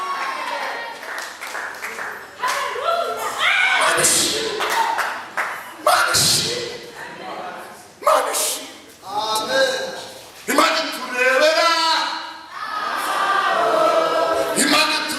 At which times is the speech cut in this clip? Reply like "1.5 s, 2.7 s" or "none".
none